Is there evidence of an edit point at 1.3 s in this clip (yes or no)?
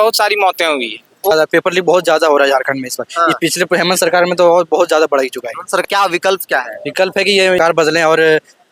yes